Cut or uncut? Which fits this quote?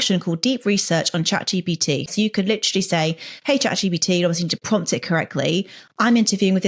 cut